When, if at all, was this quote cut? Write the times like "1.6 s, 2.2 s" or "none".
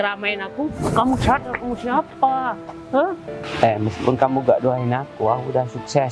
3.4 s

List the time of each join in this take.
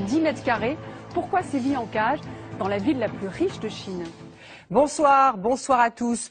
4.2 s

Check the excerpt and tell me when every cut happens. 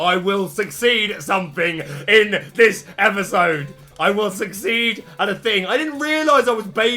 none

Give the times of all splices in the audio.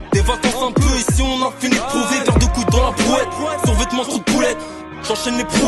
none

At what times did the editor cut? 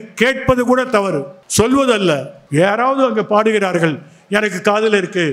1.3 s, 2.4 s

